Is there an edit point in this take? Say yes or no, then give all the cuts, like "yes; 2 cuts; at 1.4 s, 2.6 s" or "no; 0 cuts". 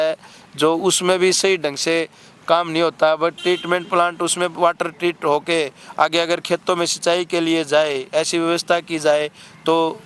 no; 0 cuts